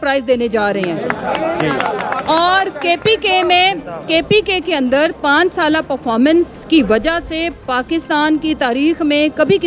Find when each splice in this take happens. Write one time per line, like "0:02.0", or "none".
none